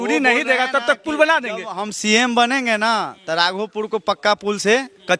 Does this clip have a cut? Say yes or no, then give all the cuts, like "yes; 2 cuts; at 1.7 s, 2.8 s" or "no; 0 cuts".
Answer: no; 0 cuts